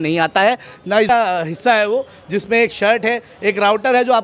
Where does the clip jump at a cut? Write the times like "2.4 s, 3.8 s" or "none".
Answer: 1.1 s

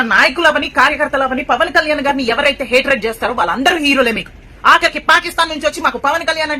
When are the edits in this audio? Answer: none

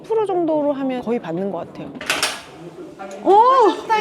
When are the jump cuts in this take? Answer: 2.0 s

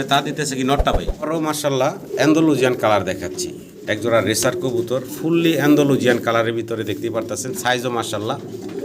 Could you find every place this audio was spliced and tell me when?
1.1 s

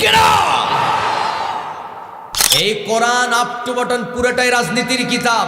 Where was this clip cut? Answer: 2.4 s

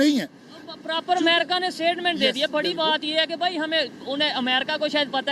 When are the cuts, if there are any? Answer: none

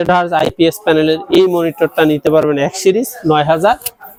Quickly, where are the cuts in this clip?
none

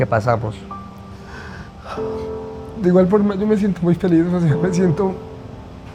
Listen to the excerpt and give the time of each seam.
none

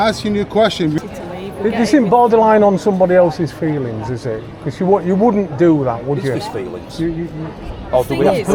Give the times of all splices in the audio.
1.0 s

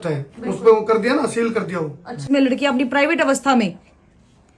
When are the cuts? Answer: 2.2 s

